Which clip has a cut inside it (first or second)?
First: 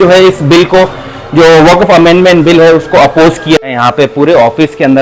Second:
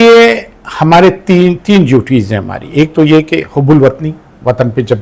first